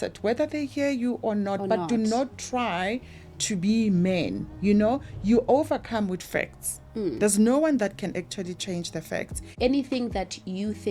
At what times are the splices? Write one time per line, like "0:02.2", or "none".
0:09.4